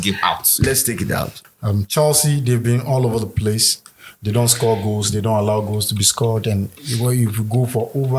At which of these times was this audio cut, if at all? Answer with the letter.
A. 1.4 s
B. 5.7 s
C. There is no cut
A